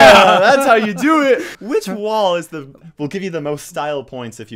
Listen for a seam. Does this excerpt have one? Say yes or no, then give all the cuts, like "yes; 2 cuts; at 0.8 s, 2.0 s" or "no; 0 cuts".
yes; 1 cut; at 1.5 s